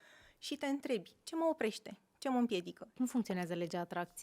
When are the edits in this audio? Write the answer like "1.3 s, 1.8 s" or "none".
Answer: 2.9 s